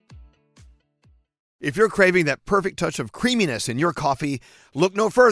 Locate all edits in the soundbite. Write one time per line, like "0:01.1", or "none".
0:01.5